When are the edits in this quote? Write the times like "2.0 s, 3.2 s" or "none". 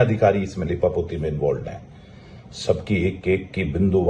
none